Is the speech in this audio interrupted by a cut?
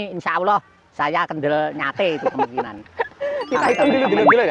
no; 0 cuts

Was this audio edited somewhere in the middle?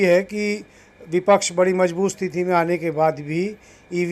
no; 0 cuts

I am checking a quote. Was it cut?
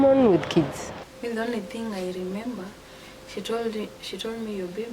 yes; 1 cut; at 1.0 s

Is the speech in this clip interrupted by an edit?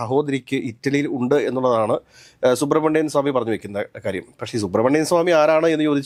no; 0 cuts

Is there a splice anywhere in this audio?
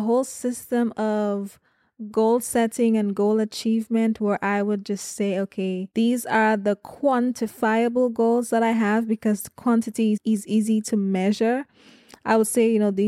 yes; 1 cut; at 10.2 s

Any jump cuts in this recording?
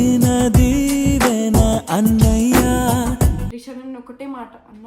yes; 1 cut; at 3.5 s

